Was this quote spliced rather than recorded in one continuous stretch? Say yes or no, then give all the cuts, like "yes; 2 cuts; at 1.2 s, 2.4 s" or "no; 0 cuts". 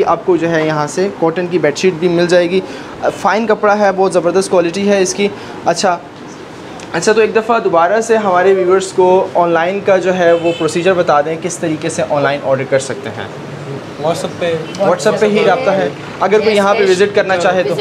no; 0 cuts